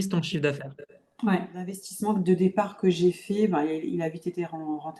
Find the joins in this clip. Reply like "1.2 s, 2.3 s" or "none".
1.9 s